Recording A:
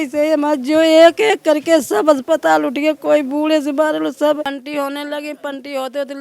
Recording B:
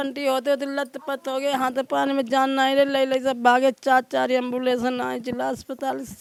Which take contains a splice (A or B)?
A